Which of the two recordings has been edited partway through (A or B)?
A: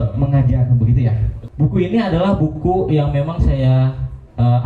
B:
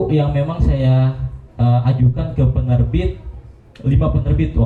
A